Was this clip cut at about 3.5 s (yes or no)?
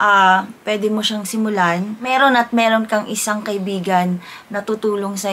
no